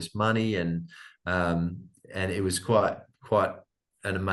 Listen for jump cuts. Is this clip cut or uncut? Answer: uncut